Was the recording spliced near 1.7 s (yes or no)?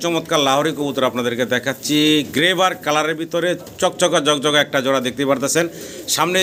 no